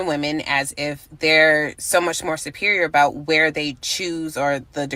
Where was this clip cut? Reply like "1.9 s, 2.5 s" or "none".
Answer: none